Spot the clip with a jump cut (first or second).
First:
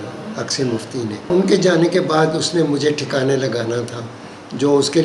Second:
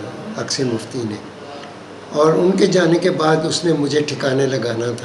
first